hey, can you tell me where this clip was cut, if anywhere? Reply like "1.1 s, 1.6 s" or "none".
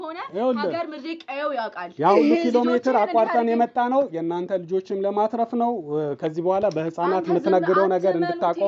none

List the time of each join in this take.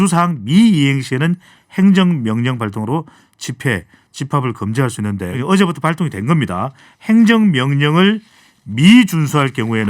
5.4 s

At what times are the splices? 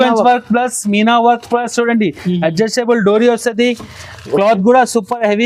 none

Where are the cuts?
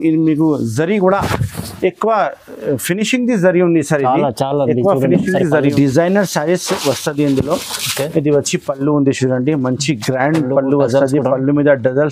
5.7 s

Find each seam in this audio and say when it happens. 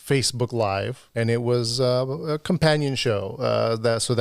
1.0 s

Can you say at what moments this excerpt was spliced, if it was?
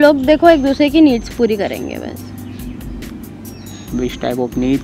none

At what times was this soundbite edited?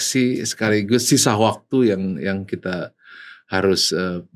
none

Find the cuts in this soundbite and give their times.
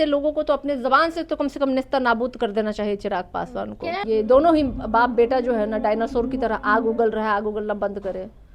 4.0 s

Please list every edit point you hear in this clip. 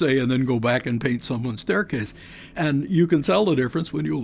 2.5 s

